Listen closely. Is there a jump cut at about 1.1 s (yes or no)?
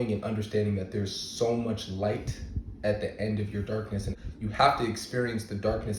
no